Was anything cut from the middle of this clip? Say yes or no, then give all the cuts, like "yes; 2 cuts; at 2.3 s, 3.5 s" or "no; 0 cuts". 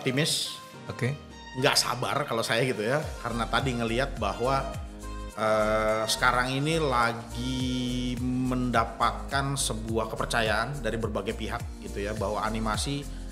no; 0 cuts